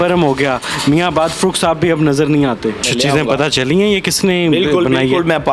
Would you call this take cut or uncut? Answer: cut